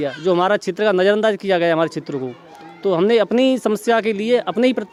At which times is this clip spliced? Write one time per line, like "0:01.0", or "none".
none